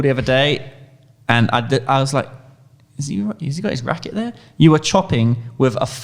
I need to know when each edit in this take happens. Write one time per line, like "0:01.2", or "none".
none